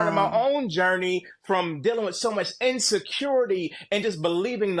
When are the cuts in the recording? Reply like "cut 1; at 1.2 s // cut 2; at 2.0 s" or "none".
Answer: none